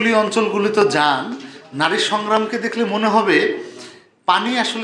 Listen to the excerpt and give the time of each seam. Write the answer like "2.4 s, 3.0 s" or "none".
none